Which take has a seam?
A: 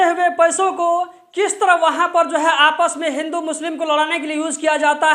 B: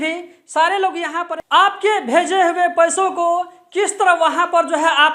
B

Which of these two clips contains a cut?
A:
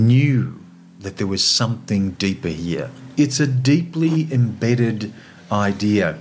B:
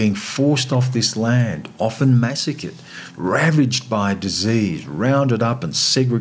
A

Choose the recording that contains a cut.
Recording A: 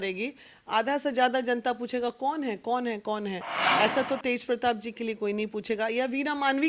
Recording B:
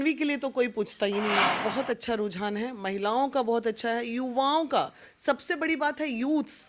B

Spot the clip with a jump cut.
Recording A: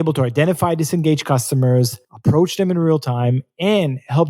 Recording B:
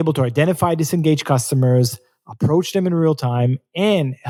A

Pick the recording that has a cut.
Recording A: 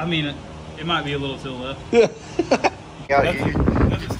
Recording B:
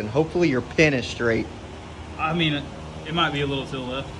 A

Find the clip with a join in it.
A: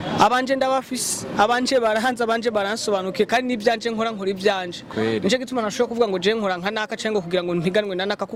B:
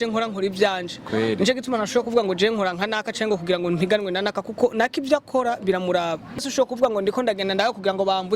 B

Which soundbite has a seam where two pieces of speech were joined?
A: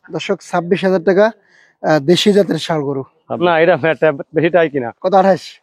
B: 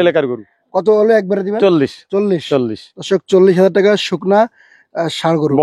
A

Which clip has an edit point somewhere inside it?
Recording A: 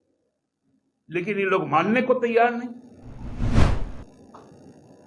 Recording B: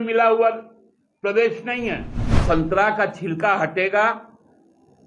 B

